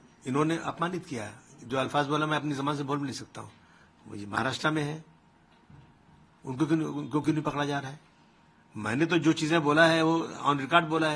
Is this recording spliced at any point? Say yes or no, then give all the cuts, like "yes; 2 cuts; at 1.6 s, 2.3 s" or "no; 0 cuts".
no; 0 cuts